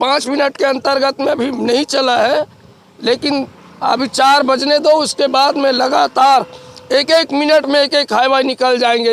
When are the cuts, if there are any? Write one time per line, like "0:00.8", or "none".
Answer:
none